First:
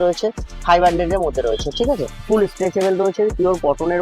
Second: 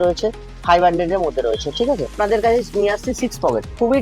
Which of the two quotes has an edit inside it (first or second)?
first